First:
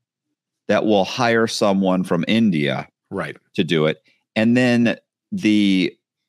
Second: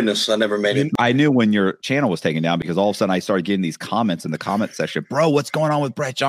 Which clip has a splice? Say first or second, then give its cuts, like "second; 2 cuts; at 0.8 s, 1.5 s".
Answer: second; 2 cuts; at 0.9 s, 1.8 s